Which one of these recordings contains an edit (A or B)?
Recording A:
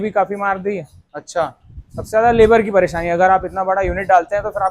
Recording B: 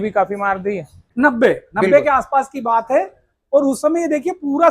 B